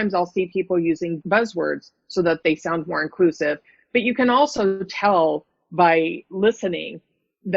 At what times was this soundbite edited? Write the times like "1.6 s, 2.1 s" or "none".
1.2 s